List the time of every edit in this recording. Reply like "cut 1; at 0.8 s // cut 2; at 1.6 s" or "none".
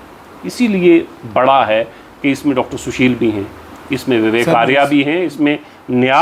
none